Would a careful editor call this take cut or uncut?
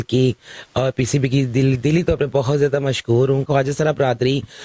cut